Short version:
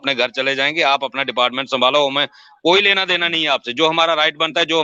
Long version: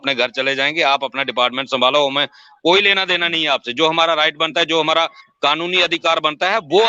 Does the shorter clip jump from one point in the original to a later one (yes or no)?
no